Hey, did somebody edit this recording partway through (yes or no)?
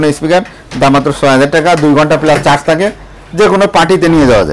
no